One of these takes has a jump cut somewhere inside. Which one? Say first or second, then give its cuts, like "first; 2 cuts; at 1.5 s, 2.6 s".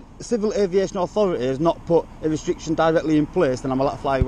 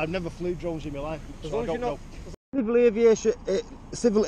second; 1 cut; at 2.4 s